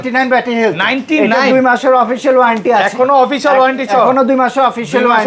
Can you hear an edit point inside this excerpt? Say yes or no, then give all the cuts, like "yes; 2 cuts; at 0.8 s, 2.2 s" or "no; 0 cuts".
no; 0 cuts